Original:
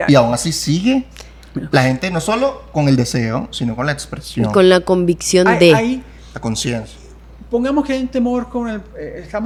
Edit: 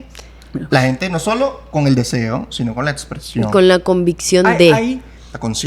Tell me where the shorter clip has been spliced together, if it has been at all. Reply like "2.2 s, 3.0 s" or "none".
none